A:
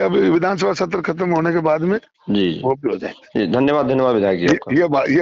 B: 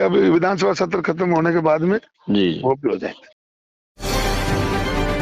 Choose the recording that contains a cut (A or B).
B